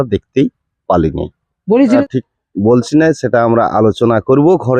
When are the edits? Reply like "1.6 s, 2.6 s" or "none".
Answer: 2.0 s